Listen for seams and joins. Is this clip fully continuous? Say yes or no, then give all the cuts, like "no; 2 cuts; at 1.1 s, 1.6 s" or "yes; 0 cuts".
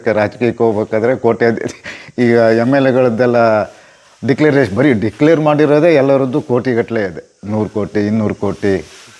yes; 0 cuts